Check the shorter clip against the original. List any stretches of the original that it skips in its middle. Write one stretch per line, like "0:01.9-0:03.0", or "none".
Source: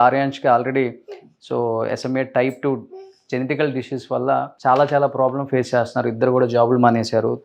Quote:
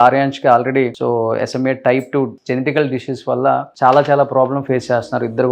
0:01.0-0:01.5
0:02.9-0:03.2